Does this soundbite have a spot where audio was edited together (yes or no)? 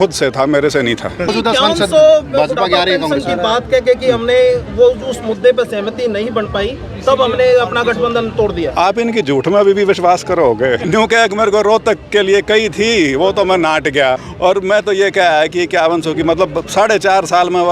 yes